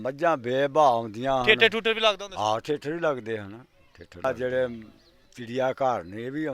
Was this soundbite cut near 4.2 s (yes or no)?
yes